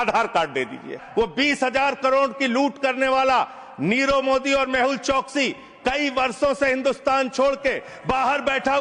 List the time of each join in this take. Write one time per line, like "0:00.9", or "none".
0:01.0